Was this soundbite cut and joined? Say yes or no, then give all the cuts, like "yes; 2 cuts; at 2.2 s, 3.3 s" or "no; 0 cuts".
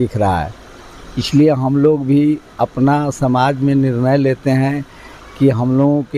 no; 0 cuts